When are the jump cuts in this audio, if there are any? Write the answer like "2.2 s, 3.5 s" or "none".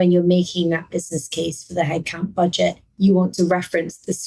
2.9 s